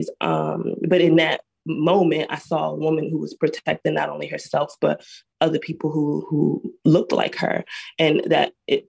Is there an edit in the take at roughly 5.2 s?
yes; 1 cut; at 5.2 s

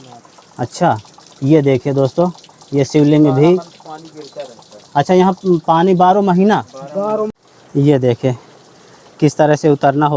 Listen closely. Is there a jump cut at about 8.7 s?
no; 1 cut; at 7.3 s

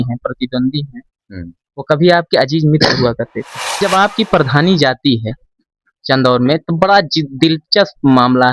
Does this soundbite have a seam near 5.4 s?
no; 1 cut; at 3.8 s

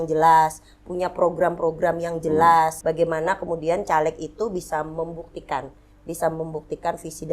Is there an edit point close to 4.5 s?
no; 1 cut; at 2.8 s

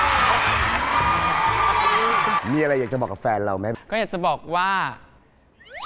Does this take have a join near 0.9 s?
no; 2 cuts; at 2.4 s, 3.7 s

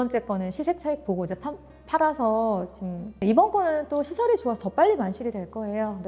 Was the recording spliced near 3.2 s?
yes; 1 cut; at 3.2 s

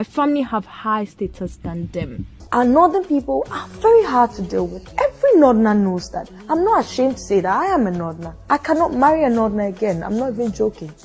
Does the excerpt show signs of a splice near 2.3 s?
yes; 1 cut; at 2.3 s

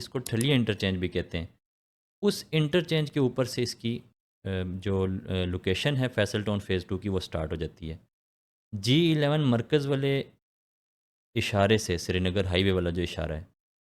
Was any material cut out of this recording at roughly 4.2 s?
no; 0 cuts

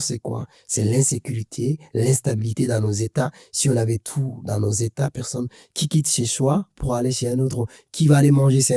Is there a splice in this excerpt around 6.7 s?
no; 0 cuts

